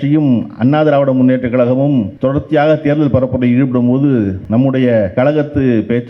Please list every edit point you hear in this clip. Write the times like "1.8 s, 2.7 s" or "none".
2.1 s, 4.4 s, 5.1 s